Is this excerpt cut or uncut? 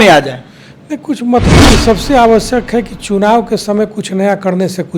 cut